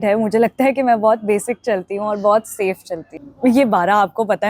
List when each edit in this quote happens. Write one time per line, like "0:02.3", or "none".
0:03.1